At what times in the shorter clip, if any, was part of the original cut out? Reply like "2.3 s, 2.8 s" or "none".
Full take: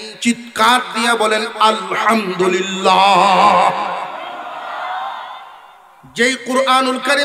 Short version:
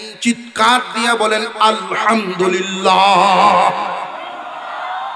none